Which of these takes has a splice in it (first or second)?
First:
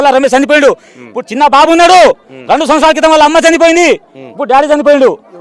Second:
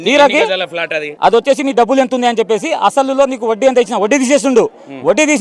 second